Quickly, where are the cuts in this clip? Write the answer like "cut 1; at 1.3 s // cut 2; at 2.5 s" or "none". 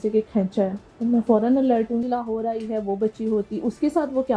cut 1; at 2.1 s